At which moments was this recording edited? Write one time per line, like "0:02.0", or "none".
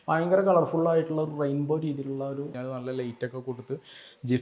0:02.6